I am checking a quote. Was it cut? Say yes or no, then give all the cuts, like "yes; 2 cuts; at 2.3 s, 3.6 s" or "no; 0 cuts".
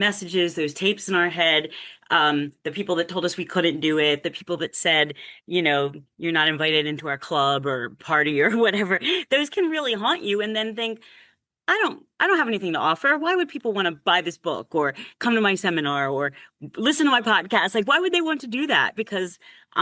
no; 0 cuts